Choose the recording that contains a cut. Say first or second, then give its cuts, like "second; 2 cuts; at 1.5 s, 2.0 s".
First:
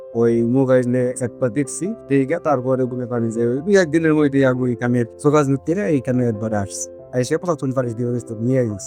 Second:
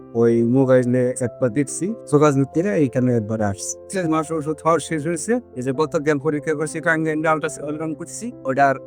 second; 2 cuts; at 2.0 s, 3.8 s